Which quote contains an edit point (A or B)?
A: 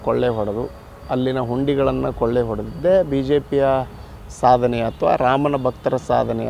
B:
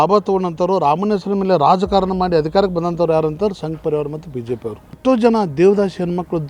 B